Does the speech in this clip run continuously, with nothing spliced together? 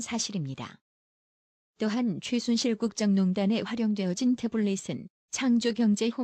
yes; 0 cuts

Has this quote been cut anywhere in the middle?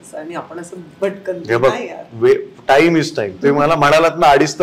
no; 0 cuts

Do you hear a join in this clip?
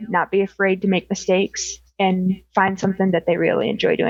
no; 0 cuts

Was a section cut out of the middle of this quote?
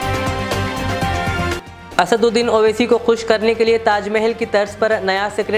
no; 0 cuts

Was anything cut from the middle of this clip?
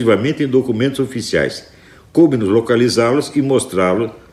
no; 0 cuts

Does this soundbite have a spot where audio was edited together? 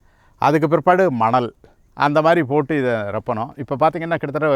no; 0 cuts

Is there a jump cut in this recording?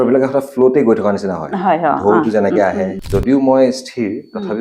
yes; 1 cut; at 3.0 s

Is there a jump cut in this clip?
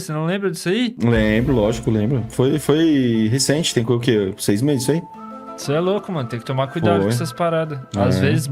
yes; 1 cut; at 0.9 s

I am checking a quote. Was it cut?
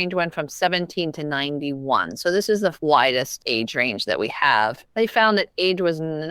yes; 2 cuts; at 3.4 s, 4.8 s

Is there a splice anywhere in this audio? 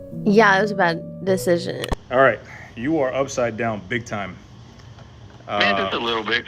yes; 1 cut; at 1.9 s

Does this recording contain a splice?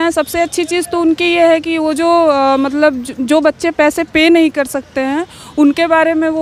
no; 0 cuts

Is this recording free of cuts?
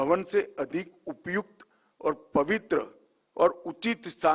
yes; 0 cuts

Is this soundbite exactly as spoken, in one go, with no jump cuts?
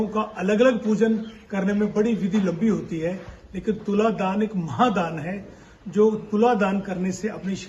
yes; 0 cuts

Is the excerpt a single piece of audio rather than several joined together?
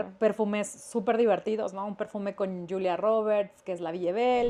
yes; 0 cuts

